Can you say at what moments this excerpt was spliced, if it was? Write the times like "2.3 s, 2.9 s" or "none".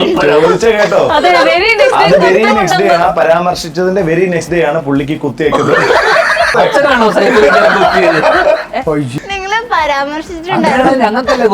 6.5 s, 9.1 s